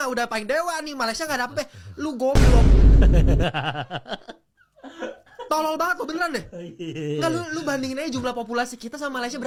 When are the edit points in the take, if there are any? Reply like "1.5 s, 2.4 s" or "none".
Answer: none